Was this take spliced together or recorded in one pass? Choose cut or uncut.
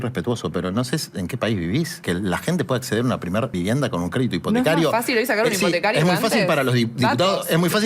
cut